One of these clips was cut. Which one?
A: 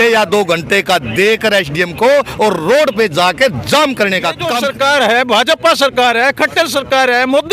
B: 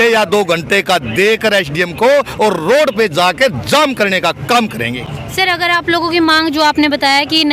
A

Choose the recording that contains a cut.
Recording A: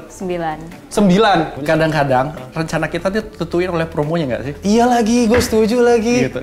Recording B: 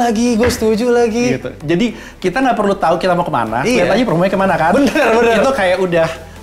A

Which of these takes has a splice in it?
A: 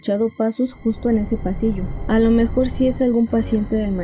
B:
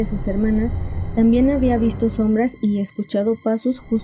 A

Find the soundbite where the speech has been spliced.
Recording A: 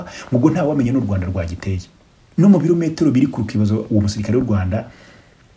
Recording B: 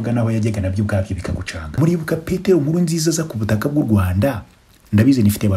B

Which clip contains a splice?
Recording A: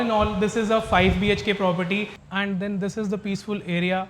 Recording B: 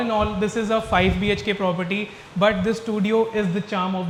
A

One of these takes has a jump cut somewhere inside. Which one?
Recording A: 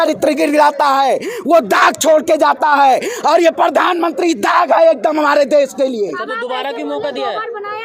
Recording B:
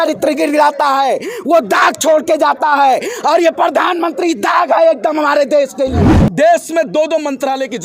B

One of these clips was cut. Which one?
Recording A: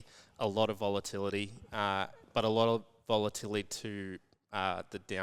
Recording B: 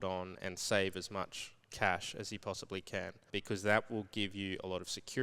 B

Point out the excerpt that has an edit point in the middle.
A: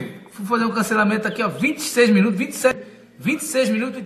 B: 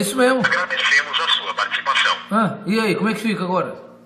A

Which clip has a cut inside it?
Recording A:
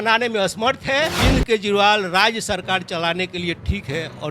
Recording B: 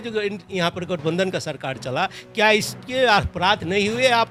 A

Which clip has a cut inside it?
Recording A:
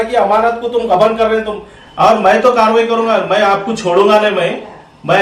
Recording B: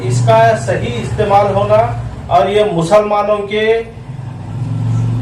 A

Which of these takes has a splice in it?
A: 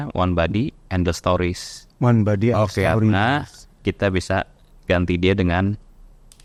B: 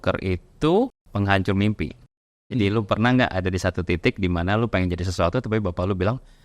B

